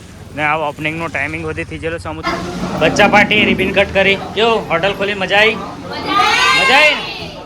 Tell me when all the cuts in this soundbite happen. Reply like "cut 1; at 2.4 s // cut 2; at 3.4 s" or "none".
cut 1; at 2.2 s